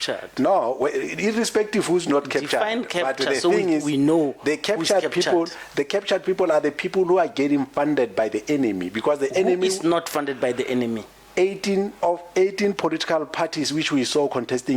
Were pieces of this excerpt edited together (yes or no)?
no